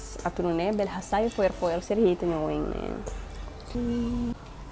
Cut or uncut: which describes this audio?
cut